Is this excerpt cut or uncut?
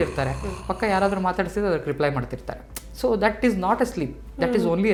uncut